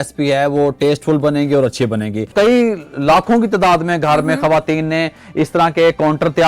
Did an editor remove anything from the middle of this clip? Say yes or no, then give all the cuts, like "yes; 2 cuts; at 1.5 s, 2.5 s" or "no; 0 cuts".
yes; 1 cut; at 2.3 s